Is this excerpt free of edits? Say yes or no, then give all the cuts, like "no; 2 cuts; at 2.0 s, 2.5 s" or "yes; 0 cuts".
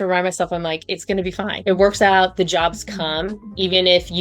no; 1 cut; at 1.5 s